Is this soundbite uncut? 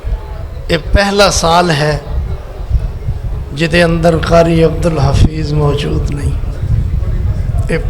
yes; 0 cuts

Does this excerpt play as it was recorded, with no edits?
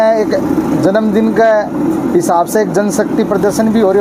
yes; 0 cuts

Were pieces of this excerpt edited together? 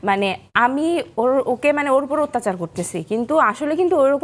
no; 0 cuts

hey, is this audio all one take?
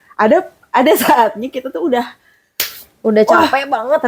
yes; 0 cuts

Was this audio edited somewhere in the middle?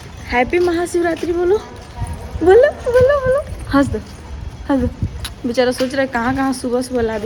no; 0 cuts

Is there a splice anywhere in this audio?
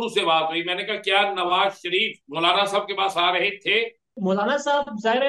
yes; 2 cuts; at 2.2 s, 4.1 s

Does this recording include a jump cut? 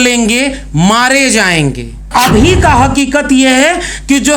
yes; 1 cut; at 2.1 s

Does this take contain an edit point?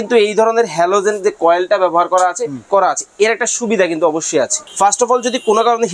yes; 2 cuts; at 2.6 s, 4.6 s

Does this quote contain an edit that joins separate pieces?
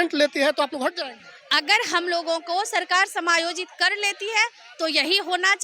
no; 0 cuts

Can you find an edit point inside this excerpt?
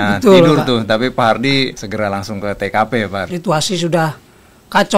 yes; 2 cuts; at 1.8 s, 3.3 s

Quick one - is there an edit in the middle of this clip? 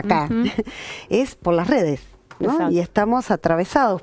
no; 0 cuts

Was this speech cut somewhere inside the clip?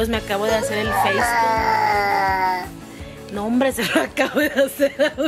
no; 0 cuts

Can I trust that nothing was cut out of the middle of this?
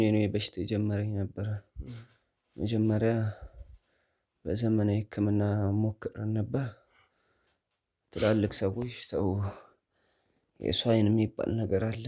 yes; 0 cuts

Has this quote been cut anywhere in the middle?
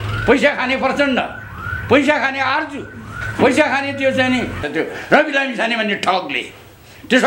yes; 1 cut; at 4.6 s

